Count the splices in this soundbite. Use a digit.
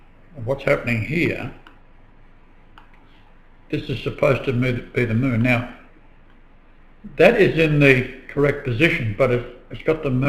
1